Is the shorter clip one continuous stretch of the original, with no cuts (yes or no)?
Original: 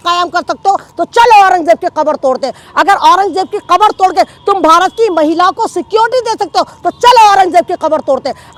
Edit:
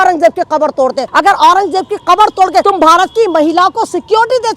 no